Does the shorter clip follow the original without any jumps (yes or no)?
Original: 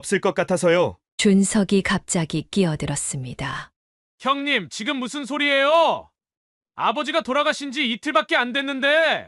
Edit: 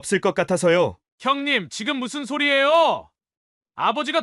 no